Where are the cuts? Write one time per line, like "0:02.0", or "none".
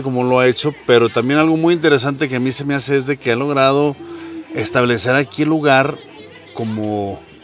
none